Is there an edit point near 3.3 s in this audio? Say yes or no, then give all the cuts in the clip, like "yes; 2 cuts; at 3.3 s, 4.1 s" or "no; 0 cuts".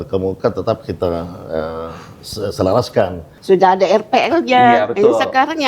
yes; 1 cut; at 3.3 s